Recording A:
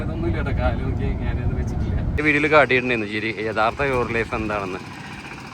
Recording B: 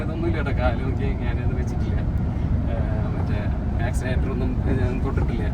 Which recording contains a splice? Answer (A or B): A